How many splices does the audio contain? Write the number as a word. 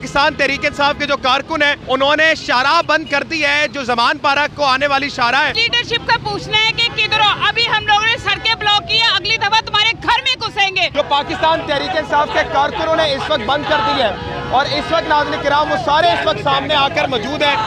three